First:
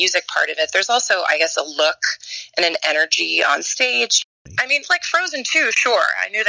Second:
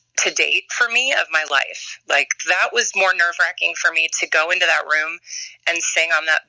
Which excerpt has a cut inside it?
first; 1 cut; at 4.3 s

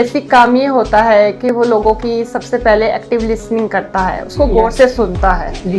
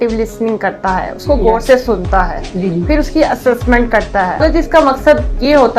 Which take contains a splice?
second; 1 cut; at 4.4 s

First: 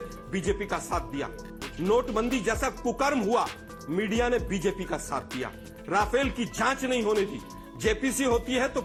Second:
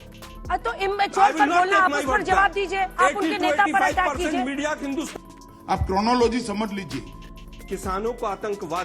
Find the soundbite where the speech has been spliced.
second; 1 cut; at 7.2 s

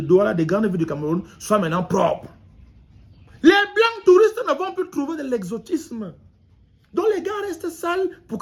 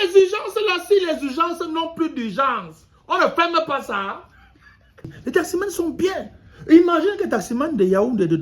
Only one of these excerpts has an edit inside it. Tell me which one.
second; 1 cut; at 5.1 s

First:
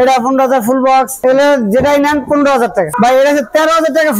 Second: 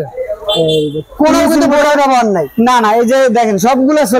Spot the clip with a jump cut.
first; 2 cuts; at 1.2 s, 2.9 s

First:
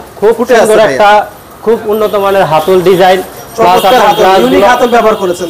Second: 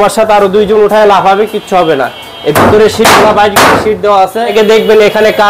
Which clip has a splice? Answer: second; 1 cut; at 4.5 s

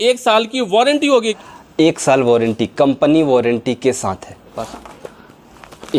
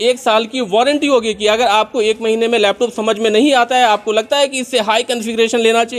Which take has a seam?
first; 2 cuts; at 1.3 s, 4.5 s

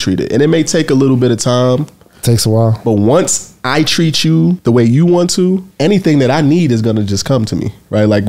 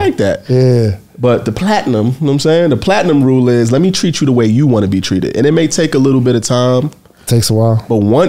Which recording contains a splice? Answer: first; 2 cuts; at 4.6 s, 5.7 s

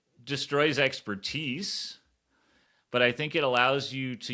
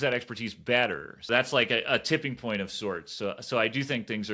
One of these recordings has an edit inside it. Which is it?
second; 1 cut; at 1.3 s

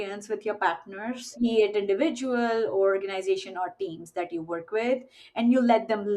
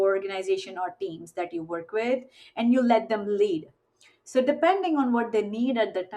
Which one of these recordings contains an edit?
first; 1 cut; at 1.3 s

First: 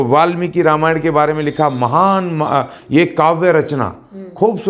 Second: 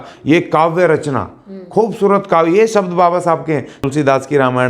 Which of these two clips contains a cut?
second; 1 cut; at 3.8 s

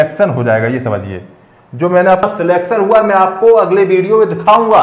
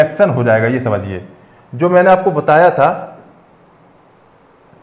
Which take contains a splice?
first; 1 cut; at 2.2 s

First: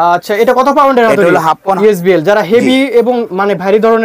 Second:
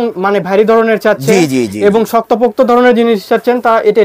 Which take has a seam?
first; 1 cut; at 1.8 s

